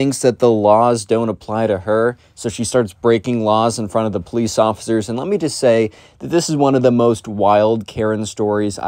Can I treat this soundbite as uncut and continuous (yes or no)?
yes